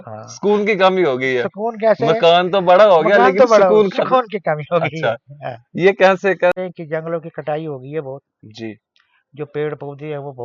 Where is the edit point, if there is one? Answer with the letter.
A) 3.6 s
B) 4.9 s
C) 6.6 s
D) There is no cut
C